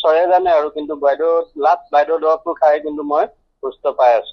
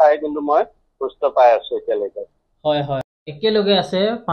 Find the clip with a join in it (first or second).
second